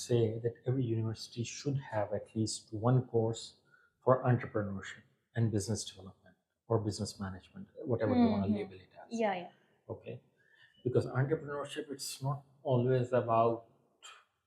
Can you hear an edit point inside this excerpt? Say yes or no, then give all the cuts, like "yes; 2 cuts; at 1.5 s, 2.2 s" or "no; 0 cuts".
no; 0 cuts